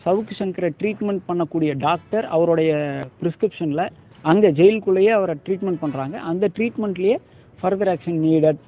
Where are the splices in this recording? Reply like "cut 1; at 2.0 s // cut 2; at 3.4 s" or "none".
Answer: cut 1; at 3.1 s